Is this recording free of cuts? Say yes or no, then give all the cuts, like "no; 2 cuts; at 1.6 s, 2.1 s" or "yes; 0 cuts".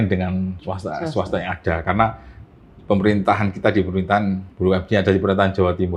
yes; 0 cuts